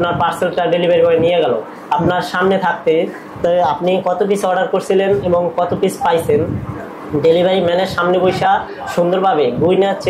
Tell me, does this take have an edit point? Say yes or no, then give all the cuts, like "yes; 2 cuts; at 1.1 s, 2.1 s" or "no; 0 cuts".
no; 0 cuts